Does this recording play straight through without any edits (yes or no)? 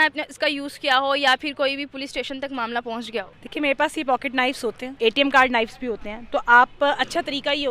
no